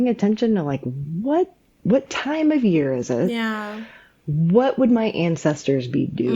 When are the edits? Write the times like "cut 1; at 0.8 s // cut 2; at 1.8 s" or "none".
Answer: cut 1; at 1.7 s

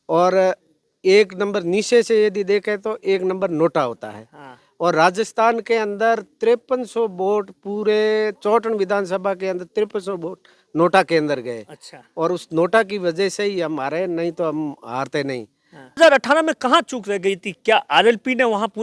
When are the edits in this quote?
cut 1; at 16.0 s

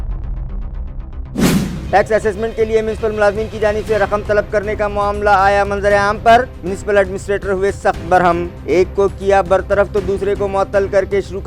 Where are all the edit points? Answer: cut 1; at 1.7 s

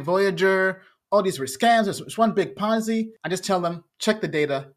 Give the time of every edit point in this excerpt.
cut 1; at 3.2 s // cut 2; at 3.9 s

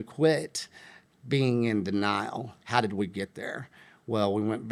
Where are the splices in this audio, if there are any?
none

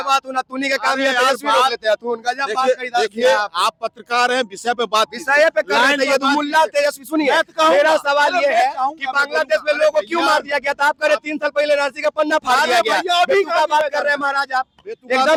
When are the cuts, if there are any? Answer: none

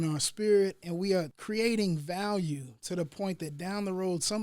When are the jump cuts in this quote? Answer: cut 1; at 1.4 s

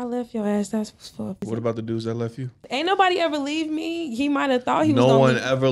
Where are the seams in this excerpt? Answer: cut 1; at 1.4 s // cut 2; at 2.6 s

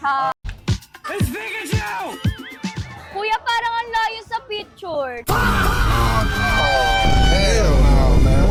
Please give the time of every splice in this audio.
none

